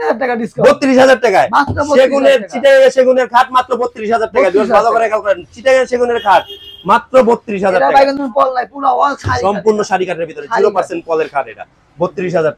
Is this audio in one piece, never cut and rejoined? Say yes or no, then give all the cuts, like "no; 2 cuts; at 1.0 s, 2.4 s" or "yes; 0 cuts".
yes; 0 cuts